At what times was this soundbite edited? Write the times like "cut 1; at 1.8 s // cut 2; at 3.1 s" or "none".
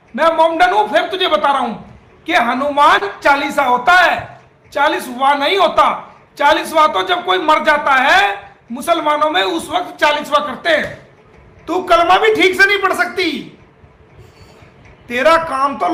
none

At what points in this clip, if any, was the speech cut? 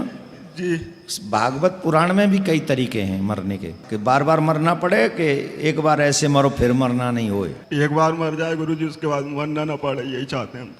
cut 1; at 3.8 s // cut 2; at 7.6 s

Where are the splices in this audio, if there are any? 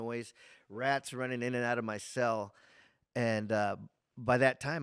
none

